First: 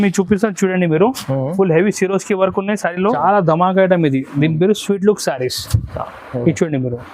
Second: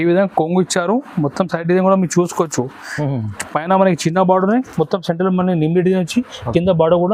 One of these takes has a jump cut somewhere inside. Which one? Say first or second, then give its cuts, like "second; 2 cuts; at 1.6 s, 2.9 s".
first; 1 cut; at 3.2 s